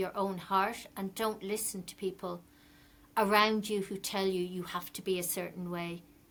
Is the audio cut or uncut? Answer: uncut